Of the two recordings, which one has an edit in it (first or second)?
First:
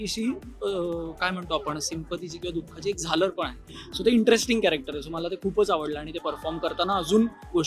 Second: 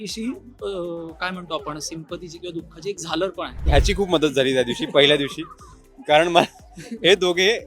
second